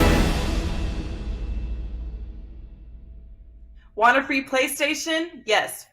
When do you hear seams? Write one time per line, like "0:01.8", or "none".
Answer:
0:03.8